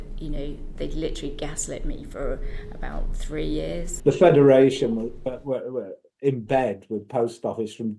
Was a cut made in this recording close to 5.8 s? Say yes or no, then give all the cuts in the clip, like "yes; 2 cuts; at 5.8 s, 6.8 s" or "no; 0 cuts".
no; 1 cut; at 3.9 s